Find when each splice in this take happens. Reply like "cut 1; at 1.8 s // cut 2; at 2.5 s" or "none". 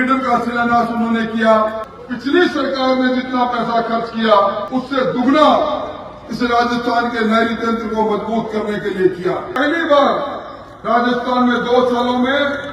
cut 1; at 1.8 s // cut 2; at 9.5 s

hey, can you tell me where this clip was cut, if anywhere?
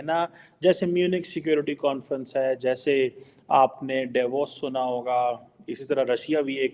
none

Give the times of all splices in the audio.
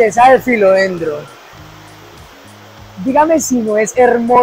none

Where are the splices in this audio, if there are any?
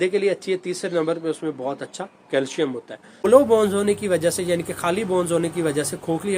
cut 1; at 3.3 s

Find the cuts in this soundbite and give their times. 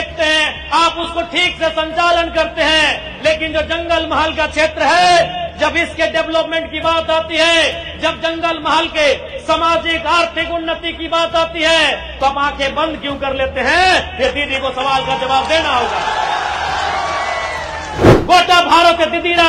cut 1; at 17.8 s

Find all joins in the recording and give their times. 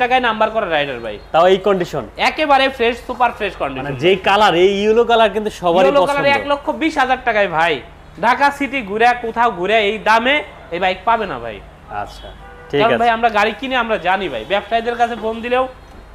none

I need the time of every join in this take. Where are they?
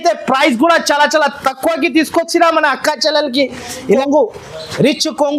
cut 1; at 4.0 s

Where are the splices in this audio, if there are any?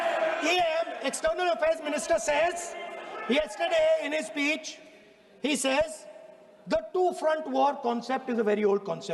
none

